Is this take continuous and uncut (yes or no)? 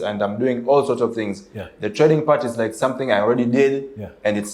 yes